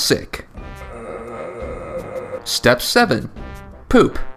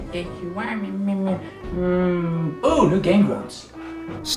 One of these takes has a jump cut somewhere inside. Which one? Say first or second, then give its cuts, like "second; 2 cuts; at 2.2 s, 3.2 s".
first; 1 cut; at 2.2 s